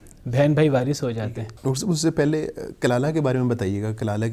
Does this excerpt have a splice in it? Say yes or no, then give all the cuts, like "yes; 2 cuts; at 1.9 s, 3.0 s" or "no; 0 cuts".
no; 0 cuts